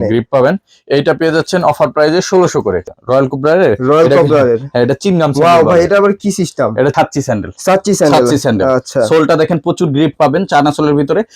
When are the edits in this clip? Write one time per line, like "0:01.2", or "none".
0:02.9
0:06.9